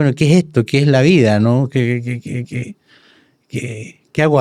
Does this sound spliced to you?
no; 0 cuts

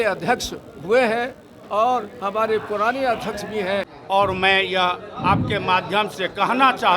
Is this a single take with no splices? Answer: no; 1 cut; at 3.9 s

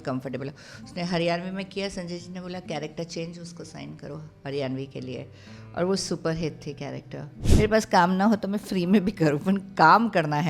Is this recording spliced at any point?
yes; 1 cut; at 7.4 s

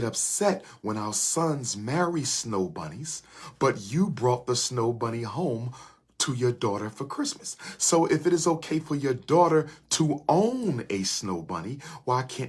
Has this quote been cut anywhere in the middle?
no; 0 cuts

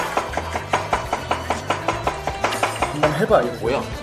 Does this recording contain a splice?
no; 0 cuts

